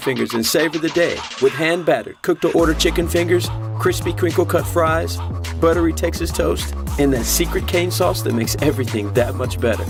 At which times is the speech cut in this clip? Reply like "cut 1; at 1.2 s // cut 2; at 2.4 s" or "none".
none